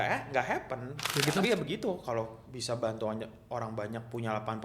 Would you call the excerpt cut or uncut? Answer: cut